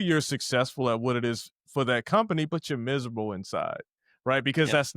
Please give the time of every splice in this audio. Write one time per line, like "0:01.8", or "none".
none